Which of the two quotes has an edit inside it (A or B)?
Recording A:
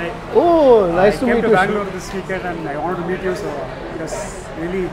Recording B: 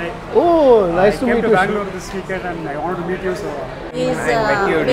B